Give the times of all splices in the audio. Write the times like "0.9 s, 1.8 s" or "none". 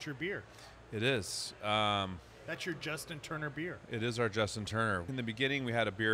5.1 s